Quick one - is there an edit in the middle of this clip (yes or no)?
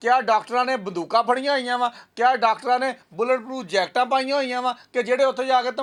no